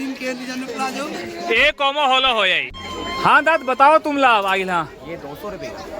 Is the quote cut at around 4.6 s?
no; 1 cut; at 3.1 s

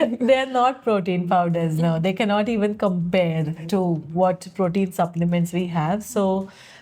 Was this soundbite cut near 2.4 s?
no; 1 cut; at 3.6 s

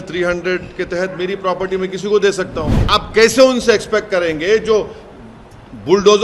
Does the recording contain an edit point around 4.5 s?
no; 1 cut; at 2.8 s

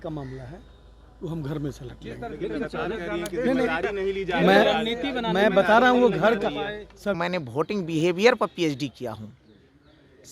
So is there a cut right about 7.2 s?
yes; 1 cut; at 7.2 s

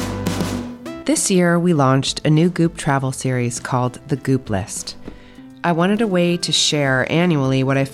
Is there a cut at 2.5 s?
no; 1 cut; at 1.0 s

